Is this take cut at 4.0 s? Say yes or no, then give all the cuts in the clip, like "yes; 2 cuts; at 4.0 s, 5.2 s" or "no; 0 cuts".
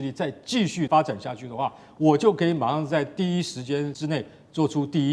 yes; 2 cuts; at 0.9 s, 4.0 s